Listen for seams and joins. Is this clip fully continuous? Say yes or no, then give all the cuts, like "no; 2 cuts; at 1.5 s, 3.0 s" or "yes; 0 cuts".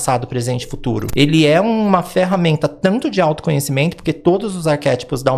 no; 1 cut; at 1.1 s